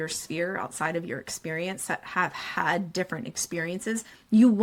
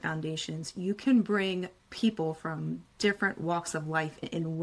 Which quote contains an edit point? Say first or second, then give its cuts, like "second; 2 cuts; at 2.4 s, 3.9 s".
second; 1 cut; at 1.8 s